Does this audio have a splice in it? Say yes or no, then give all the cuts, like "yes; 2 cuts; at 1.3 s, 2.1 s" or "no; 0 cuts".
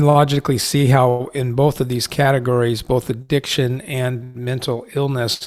no; 0 cuts